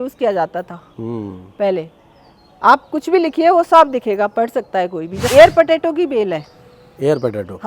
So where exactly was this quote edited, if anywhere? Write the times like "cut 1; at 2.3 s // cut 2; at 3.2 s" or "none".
cut 1; at 5.3 s